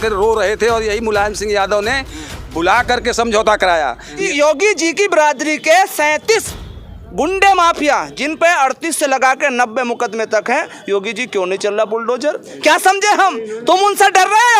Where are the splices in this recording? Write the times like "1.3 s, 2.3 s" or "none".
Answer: 4.2 s